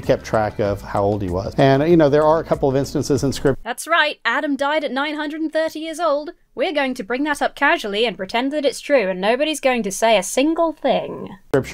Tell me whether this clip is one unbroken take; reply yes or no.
yes